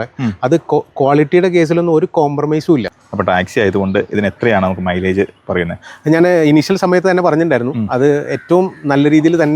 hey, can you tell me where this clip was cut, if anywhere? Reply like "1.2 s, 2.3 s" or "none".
2.9 s